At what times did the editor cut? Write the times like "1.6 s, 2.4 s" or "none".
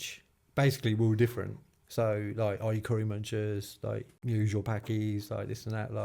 4.1 s